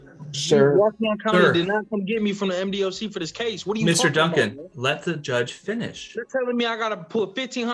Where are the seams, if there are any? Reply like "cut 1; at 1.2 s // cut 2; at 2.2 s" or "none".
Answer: none

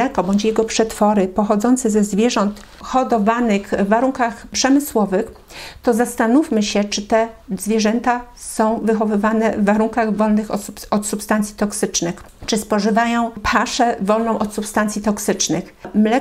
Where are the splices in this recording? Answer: none

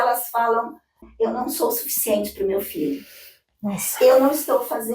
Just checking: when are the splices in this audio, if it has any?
cut 1; at 1.1 s

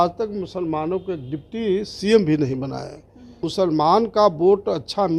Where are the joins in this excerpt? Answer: cut 1; at 3.4 s

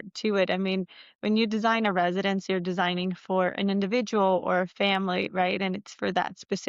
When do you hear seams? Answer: none

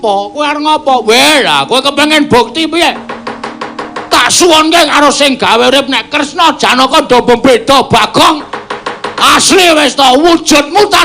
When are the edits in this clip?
cut 1; at 9.4 s

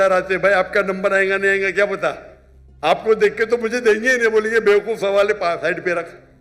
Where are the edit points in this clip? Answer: none

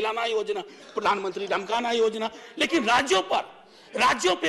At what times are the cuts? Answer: none

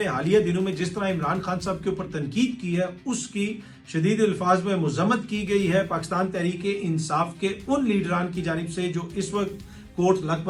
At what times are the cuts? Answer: none

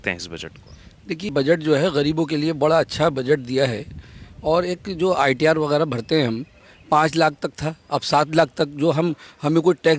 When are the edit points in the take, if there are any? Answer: cut 1; at 1.3 s

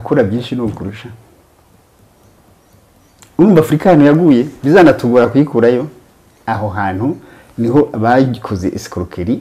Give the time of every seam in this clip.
none

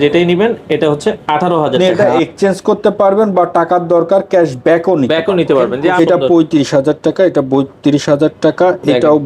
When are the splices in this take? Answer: cut 1; at 2.0 s // cut 2; at 5.8 s

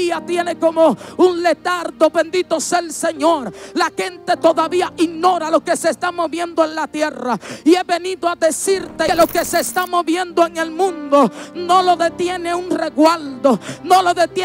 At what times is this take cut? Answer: cut 1; at 9.1 s

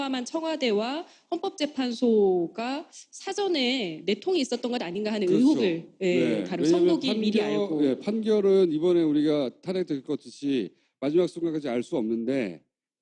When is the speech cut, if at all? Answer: cut 1; at 1.3 s

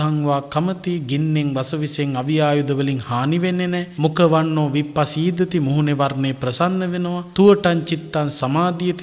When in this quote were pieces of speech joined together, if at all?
cut 1; at 3.9 s // cut 2; at 7.2 s

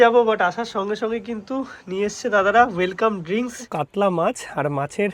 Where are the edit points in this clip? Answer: cut 1; at 3.6 s

